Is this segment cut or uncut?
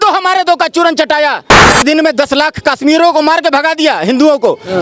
cut